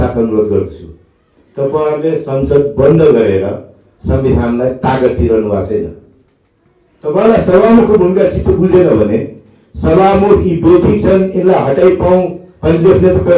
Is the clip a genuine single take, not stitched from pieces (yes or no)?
yes